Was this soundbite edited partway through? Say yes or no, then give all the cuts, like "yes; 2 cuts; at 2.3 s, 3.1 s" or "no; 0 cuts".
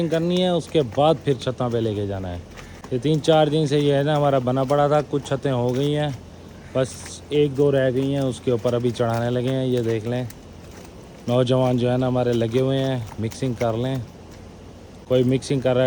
no; 0 cuts